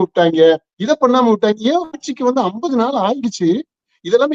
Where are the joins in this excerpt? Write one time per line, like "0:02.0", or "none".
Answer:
none